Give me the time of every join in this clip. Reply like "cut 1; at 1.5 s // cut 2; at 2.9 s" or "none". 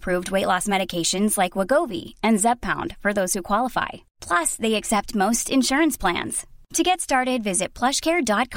none